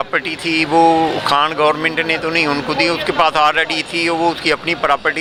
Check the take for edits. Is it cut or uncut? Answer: uncut